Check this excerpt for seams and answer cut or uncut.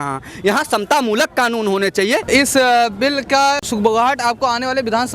cut